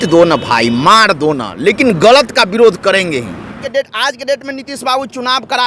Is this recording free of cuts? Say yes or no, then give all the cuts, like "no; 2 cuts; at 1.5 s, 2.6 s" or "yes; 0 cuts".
no; 1 cut; at 3.6 s